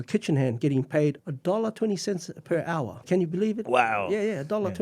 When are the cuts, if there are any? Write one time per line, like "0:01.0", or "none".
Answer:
0:01.2
0:03.0